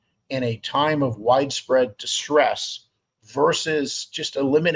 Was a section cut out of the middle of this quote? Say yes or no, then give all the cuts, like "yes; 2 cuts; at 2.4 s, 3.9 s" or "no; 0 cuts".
no; 0 cuts